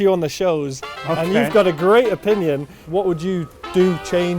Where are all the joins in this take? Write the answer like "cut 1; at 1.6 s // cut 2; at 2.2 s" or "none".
cut 1; at 2.8 s